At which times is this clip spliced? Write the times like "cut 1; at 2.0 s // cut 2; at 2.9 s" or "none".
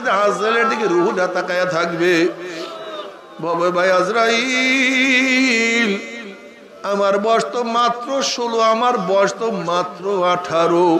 none